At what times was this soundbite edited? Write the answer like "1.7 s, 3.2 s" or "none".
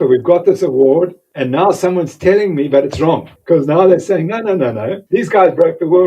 1.3 s, 3.3 s, 5.0 s